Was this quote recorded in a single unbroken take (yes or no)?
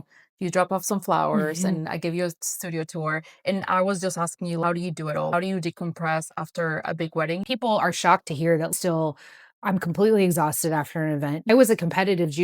no